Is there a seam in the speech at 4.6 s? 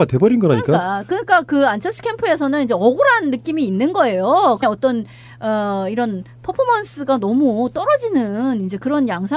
no; 0 cuts

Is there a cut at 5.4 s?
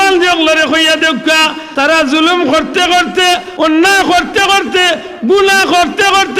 no; 2 cuts; at 1.6 s, 3.5 s

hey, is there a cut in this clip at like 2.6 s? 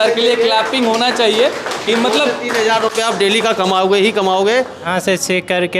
no; 1 cut; at 4.9 s

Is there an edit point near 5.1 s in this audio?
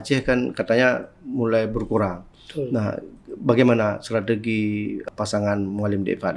yes; 1 cut; at 5.1 s

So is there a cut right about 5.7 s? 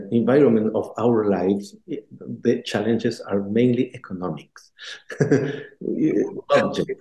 no; 0 cuts

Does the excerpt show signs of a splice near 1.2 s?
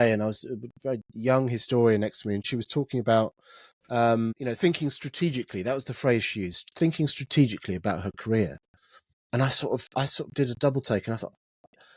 no; 2 cuts; at 2.4 s, 4.4 s

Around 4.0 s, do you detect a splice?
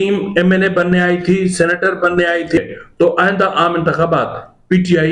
no; 1 cut; at 2.6 s

